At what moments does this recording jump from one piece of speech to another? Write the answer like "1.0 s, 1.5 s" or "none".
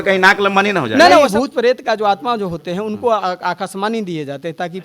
1.3 s